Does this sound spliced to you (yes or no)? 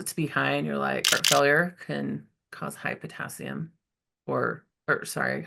yes